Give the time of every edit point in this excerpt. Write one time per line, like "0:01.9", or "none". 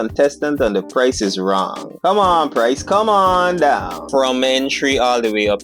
0:04.0